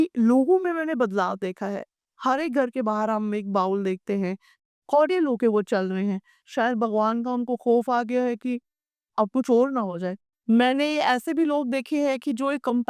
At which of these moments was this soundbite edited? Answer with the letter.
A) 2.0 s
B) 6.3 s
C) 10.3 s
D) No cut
C